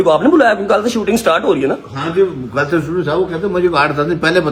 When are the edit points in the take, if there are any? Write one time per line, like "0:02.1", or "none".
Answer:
none